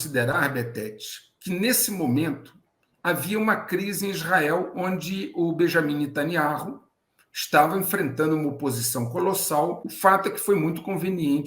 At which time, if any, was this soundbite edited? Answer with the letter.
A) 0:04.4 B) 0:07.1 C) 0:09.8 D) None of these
C